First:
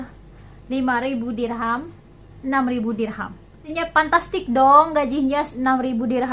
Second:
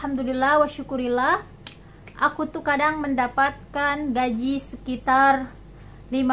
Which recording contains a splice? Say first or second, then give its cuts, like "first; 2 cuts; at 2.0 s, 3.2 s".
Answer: first; 1 cut; at 3.7 s